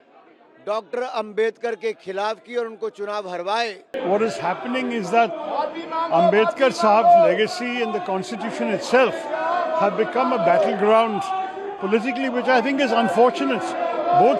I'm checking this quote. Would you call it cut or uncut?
cut